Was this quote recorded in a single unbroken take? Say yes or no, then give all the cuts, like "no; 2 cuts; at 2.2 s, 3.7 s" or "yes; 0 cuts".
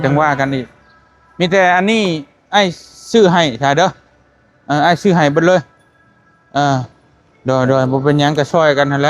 yes; 0 cuts